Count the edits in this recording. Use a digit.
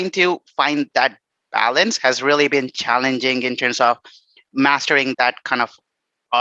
1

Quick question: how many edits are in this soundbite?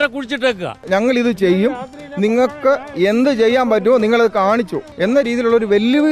2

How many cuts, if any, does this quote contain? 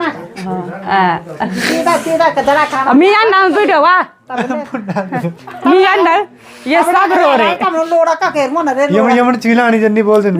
0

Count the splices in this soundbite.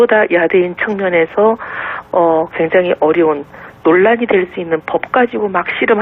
1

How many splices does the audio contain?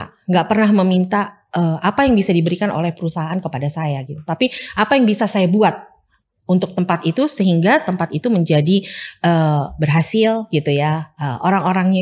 0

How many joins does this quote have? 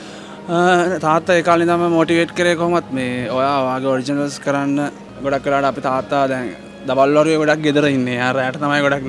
1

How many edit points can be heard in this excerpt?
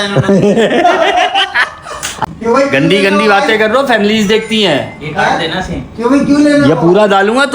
1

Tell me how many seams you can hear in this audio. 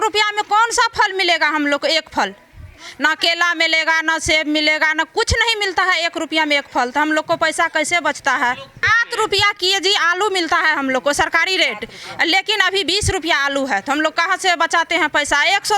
1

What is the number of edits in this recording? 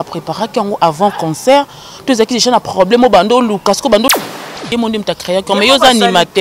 1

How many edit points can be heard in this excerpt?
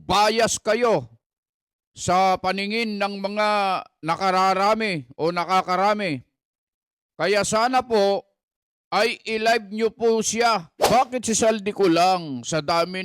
1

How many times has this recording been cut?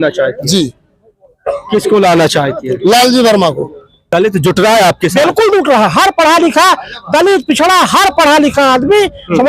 1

